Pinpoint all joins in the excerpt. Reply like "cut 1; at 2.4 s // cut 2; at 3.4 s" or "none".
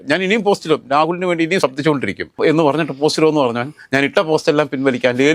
none